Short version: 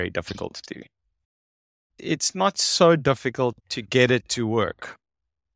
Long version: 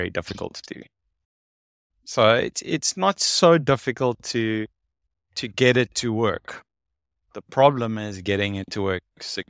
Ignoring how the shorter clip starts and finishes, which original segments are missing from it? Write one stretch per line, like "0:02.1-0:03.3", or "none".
0:02.0-0:02.6
0:04.2-0:05.3